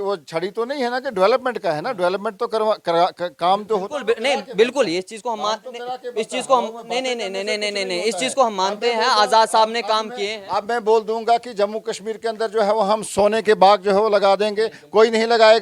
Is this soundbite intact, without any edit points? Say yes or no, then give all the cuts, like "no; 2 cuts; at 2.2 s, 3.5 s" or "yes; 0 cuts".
yes; 0 cuts